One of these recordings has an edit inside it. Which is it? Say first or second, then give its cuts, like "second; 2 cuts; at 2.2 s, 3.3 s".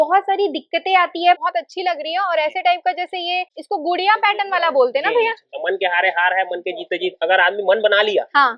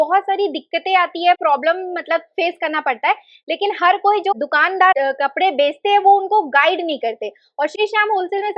first; 3 cuts; at 1.4 s, 3.6 s, 5.6 s